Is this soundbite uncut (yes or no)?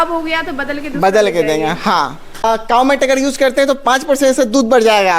no